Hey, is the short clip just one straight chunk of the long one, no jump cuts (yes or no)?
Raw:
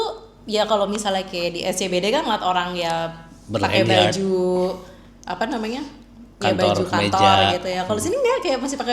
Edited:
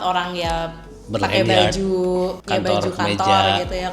no